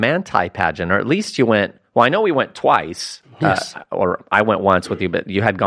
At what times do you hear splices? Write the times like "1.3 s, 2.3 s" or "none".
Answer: none